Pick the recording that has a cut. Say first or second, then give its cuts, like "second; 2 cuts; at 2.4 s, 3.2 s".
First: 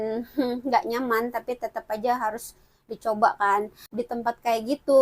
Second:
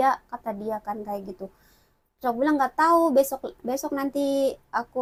first; 1 cut; at 3.9 s